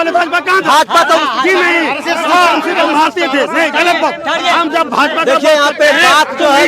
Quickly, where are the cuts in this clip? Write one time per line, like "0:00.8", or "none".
none